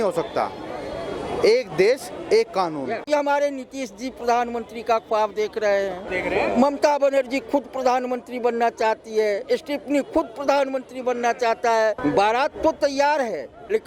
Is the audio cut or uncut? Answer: cut